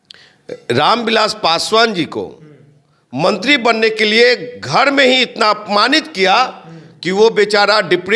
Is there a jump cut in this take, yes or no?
no